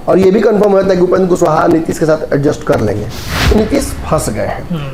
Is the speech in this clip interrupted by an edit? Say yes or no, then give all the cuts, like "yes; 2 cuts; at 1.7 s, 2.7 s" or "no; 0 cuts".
yes; 1 cut; at 3.3 s